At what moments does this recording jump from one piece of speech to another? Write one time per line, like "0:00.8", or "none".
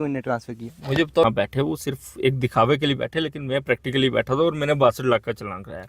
0:01.2